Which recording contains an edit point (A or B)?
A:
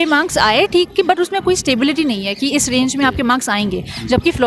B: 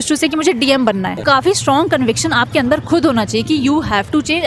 B